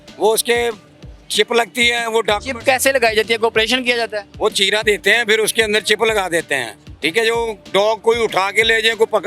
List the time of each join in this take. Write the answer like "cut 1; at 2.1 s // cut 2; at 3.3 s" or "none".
none